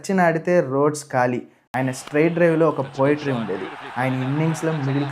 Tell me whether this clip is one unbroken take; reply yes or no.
no